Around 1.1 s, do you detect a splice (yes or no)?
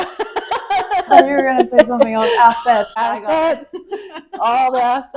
yes